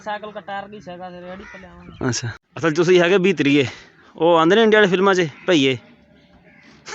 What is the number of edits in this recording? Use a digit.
1